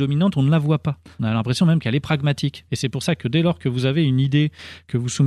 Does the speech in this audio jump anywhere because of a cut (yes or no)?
yes